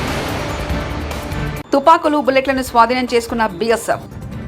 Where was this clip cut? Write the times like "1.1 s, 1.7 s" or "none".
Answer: 1.6 s